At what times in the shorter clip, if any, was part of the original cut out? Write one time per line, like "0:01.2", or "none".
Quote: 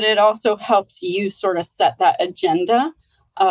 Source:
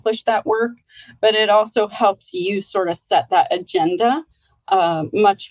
none